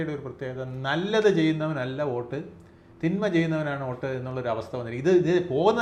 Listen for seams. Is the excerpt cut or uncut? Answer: uncut